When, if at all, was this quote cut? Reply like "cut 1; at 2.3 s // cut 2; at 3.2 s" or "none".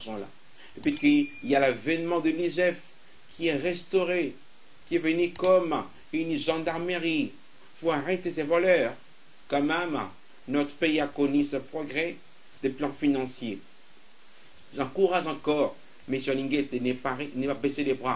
none